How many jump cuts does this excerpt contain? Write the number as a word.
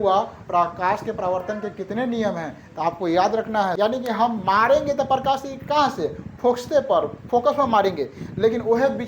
one